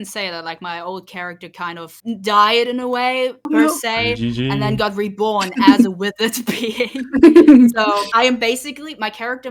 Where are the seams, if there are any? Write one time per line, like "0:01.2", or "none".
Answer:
none